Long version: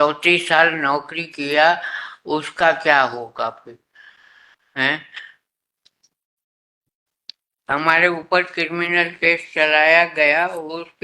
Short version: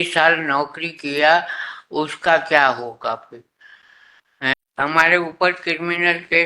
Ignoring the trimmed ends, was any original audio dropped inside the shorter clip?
yes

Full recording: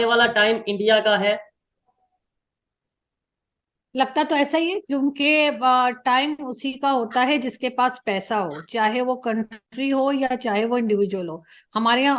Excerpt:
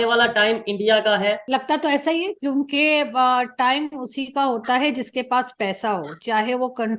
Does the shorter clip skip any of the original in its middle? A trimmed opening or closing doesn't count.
yes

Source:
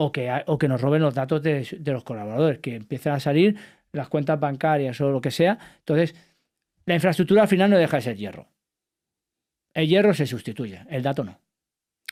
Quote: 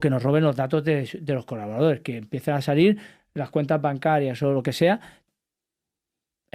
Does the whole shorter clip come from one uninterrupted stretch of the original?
no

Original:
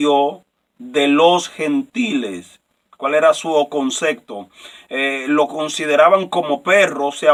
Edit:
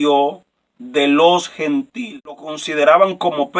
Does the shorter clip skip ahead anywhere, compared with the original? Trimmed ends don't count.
yes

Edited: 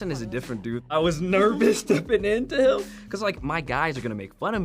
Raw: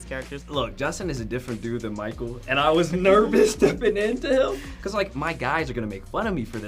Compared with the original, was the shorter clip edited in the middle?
yes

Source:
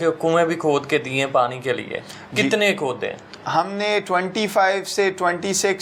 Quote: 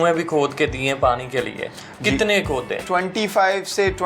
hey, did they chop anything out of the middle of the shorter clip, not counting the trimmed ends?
yes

